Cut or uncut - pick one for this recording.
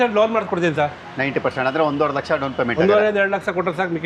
uncut